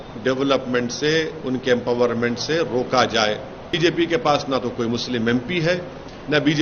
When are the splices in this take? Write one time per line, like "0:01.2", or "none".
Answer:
0:03.8